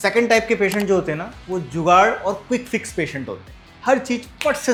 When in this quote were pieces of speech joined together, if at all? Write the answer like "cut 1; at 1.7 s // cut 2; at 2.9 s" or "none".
none